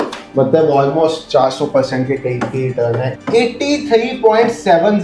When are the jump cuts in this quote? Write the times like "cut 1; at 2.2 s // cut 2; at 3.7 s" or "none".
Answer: cut 1; at 3.1 s